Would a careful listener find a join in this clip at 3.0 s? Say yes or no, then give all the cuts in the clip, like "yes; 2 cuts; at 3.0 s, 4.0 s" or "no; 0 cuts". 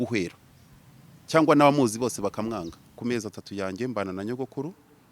yes; 1 cut; at 3.0 s